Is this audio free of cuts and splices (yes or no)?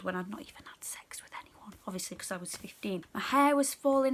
no